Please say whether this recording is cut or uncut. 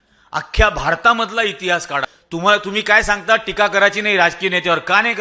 cut